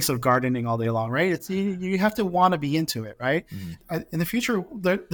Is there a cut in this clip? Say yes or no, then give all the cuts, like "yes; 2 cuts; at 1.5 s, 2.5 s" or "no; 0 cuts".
yes; 1 cut; at 3.8 s